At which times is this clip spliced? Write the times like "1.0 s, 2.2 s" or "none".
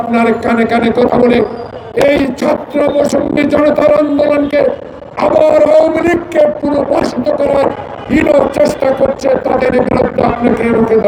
none